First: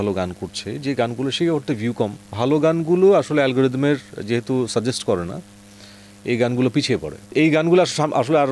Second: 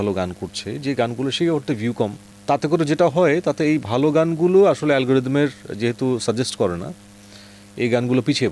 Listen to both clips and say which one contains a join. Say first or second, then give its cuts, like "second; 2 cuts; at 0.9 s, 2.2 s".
first; 2 cuts; at 2.3 s, 7.3 s